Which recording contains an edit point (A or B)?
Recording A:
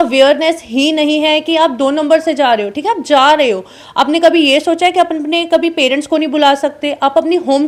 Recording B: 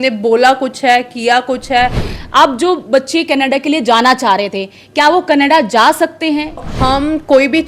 B